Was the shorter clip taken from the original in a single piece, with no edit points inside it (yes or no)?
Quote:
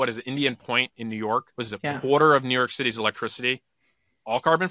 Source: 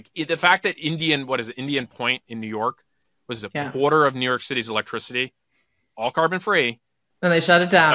no